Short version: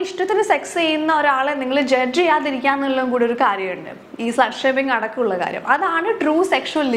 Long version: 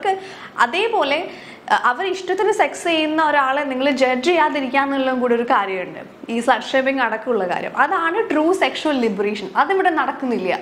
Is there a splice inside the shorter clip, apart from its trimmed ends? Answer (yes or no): no